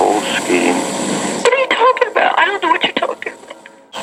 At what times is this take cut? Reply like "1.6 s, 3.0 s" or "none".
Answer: none